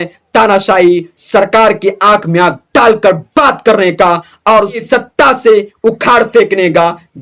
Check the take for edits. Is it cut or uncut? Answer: cut